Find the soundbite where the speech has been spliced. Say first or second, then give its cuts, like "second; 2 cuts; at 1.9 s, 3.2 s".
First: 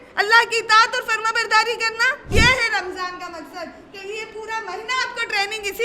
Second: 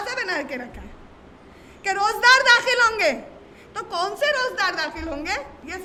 first; 1 cut; at 2.3 s